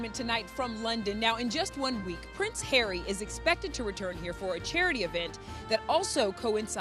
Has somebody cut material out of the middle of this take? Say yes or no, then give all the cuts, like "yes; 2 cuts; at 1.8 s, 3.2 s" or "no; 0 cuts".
no; 0 cuts